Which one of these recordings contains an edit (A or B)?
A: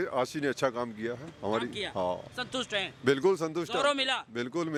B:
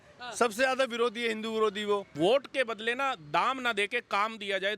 B